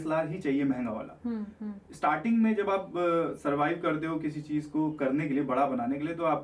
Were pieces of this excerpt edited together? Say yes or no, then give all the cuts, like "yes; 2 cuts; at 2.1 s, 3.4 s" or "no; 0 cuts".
no; 0 cuts